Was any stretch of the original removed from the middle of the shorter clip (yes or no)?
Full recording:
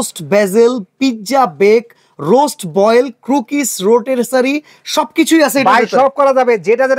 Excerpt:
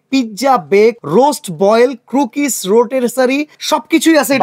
yes